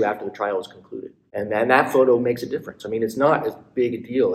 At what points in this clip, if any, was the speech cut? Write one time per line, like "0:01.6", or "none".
0:01.2